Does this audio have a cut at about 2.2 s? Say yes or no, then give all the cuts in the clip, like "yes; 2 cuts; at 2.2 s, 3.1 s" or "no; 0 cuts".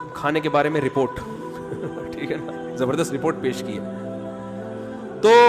no; 0 cuts